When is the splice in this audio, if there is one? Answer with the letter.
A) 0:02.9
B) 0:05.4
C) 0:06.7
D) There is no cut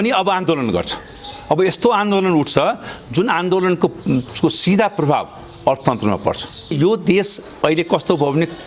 C